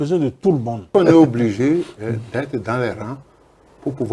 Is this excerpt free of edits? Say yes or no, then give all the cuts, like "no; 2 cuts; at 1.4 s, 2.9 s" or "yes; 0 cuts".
no; 1 cut; at 0.9 s